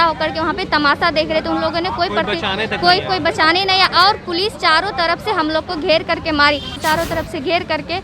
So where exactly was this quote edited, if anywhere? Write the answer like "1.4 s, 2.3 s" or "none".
6.8 s